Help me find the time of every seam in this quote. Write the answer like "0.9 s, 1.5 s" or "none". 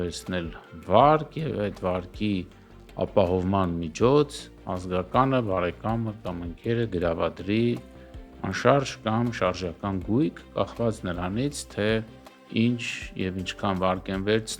none